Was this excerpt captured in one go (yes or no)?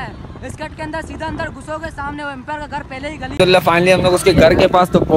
no